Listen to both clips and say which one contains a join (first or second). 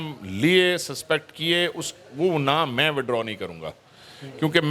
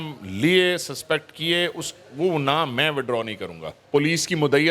second